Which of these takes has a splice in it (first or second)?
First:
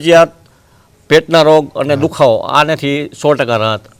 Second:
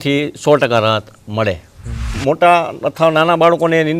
second